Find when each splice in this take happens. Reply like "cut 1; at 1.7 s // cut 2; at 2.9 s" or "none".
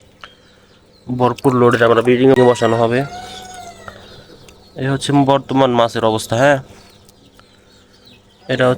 cut 1; at 2.4 s

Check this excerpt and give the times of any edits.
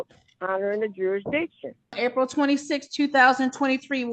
cut 1; at 1.9 s

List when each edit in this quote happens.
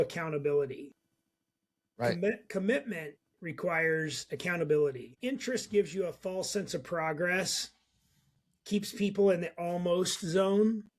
cut 1; at 5.1 s

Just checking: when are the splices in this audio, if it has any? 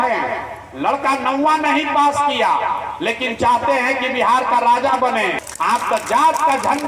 cut 1; at 5.4 s

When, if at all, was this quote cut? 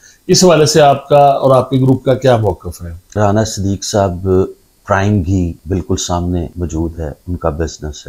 cut 1; at 3.2 s // cut 2; at 5.6 s // cut 3; at 6.5 s

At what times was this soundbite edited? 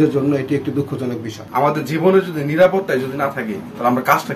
cut 1; at 1.3 s

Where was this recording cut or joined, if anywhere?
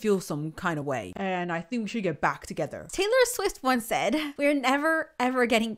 cut 1; at 1.1 s // cut 2; at 2.8 s // cut 3; at 4.3 s

